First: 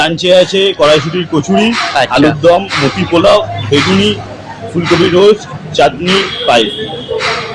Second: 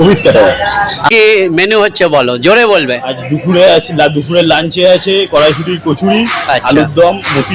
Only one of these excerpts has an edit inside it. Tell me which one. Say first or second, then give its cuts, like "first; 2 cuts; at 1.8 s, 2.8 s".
second; 1 cut; at 1.1 s